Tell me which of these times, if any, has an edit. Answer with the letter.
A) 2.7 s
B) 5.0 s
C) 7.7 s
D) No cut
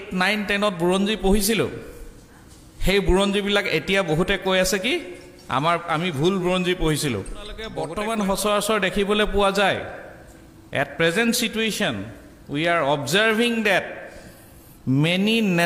C